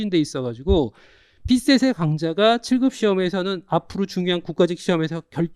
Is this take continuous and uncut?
yes; 0 cuts

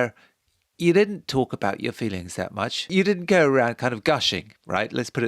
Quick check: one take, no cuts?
no; 1 cut; at 2.9 s

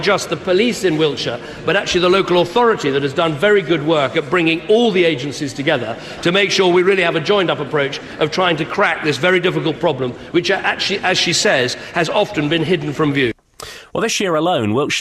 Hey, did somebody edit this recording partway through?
yes; 1 cut; at 8.0 s

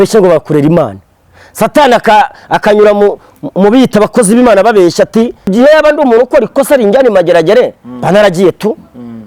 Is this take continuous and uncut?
no; 1 cut; at 5.5 s

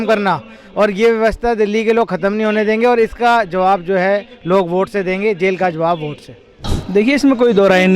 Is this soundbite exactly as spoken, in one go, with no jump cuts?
no; 1 cut; at 6.7 s

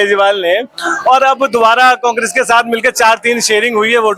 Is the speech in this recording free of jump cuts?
yes; 0 cuts

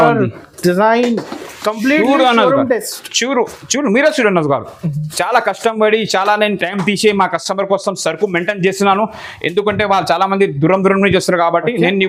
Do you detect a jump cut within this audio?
no; 0 cuts

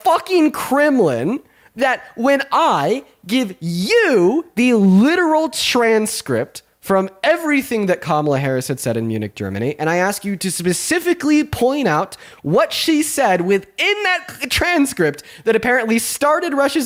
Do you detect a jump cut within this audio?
no; 0 cuts

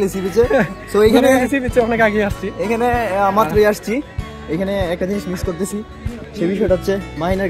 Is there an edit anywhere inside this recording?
no; 0 cuts

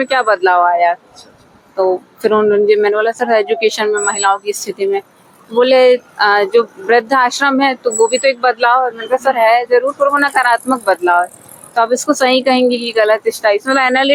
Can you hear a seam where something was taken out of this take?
no; 0 cuts

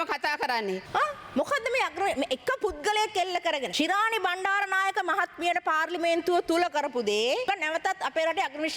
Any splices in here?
yes; 3 cuts; at 0.8 s, 3.7 s, 7.5 s

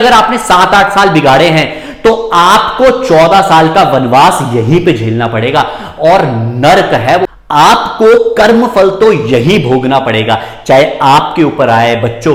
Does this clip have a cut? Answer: no; 0 cuts

